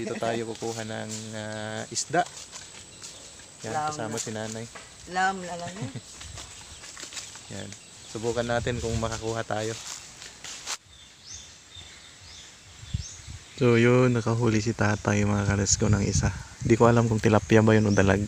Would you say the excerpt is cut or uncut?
cut